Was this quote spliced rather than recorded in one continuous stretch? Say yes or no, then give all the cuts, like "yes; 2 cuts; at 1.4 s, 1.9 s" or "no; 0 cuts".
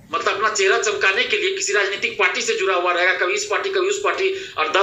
no; 0 cuts